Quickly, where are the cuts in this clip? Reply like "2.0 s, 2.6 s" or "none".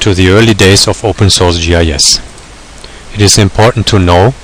none